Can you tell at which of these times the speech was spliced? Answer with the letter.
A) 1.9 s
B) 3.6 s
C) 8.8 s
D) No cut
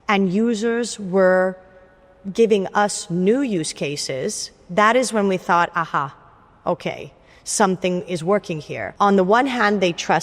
C